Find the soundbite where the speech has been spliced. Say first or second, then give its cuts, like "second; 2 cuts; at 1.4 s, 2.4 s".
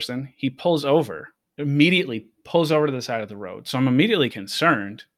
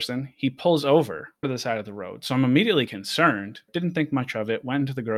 second; 2 cuts; at 1.5 s, 3.6 s